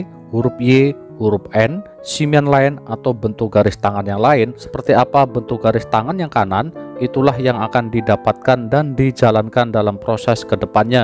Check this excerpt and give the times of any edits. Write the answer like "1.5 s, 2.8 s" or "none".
4.7 s